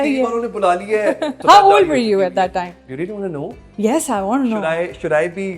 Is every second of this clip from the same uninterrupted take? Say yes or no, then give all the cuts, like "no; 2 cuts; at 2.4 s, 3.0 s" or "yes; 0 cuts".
no; 1 cut; at 1.4 s